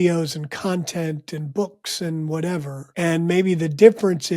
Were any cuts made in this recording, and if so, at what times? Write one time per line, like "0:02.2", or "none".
0:02.9

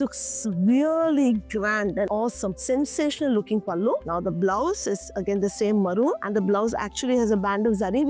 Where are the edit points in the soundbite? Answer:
none

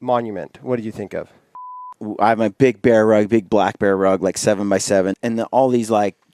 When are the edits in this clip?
0:02.0
0:05.2

